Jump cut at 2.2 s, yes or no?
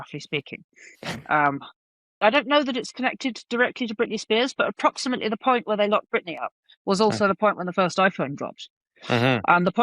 yes